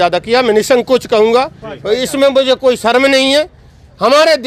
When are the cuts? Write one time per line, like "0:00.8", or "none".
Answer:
none